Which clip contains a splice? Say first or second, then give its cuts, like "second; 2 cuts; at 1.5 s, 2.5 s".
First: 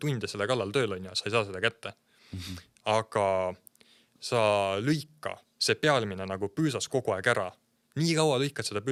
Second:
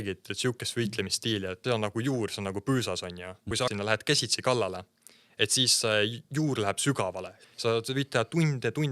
second; 3 cuts; at 1.6 s, 3.7 s, 7.3 s